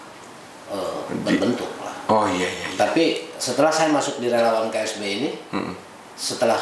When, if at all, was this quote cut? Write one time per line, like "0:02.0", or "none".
none